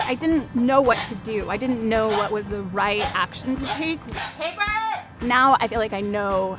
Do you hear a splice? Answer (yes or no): yes